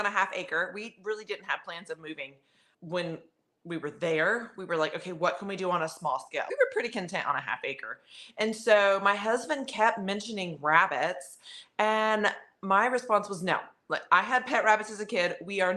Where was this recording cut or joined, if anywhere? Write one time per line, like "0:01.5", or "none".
none